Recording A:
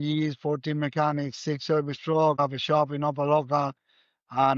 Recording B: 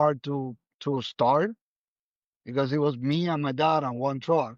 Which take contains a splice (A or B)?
A